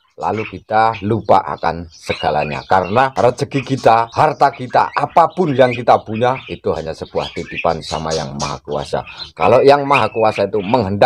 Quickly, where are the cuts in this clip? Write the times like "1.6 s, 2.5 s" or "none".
3.1 s, 4.1 s